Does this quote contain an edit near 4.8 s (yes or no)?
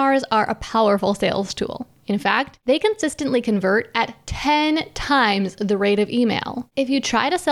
no